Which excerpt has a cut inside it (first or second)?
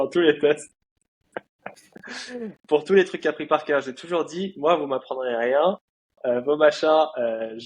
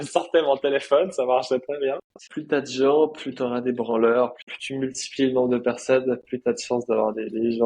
second